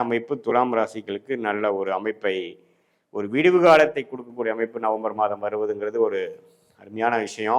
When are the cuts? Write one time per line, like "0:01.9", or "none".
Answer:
none

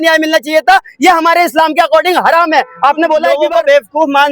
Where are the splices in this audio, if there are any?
0:03.3

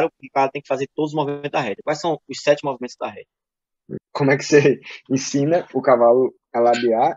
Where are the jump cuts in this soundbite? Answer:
0:04.0

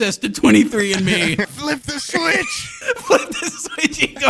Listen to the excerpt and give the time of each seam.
0:01.5
0:02.7

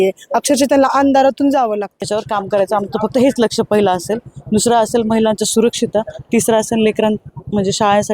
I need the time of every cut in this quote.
0:02.0

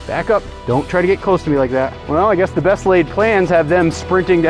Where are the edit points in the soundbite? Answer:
0:02.0

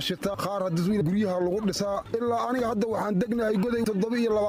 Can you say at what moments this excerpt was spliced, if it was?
0:01.0
0:02.0

